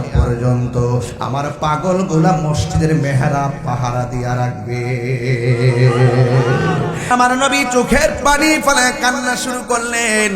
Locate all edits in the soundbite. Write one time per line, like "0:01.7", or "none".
0:07.1

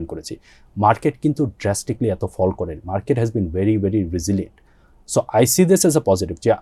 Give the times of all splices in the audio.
none

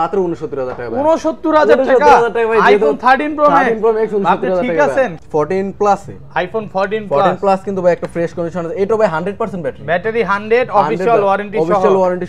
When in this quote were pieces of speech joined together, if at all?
0:05.2

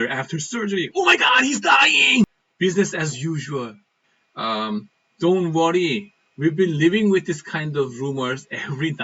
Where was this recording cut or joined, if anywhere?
0:02.4
0:04.1

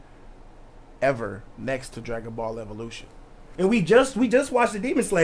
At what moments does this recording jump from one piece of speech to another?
0:03.4

